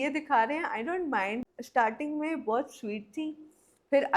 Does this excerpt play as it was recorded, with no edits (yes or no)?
no